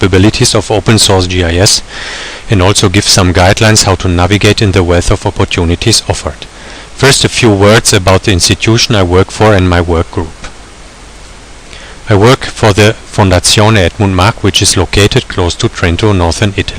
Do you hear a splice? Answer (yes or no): yes